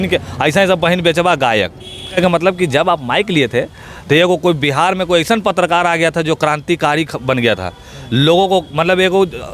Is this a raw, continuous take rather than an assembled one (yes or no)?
no